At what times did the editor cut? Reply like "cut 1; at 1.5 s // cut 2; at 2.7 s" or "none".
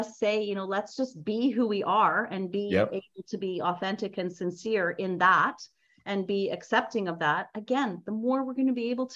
none